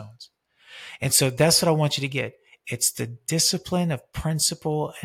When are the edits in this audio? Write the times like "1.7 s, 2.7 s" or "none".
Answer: none